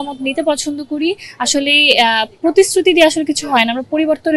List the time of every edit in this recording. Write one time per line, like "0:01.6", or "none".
none